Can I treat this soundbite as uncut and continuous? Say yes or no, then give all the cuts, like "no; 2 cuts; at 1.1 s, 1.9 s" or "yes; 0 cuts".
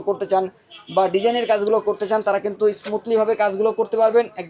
yes; 0 cuts